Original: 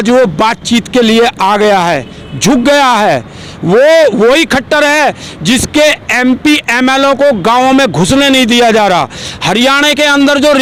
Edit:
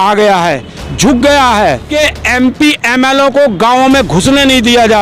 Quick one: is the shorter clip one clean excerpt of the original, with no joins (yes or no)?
no